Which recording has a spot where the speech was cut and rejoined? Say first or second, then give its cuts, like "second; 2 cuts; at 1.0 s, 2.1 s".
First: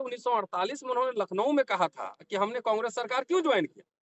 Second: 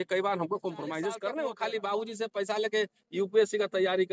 second; 1 cut; at 1.4 s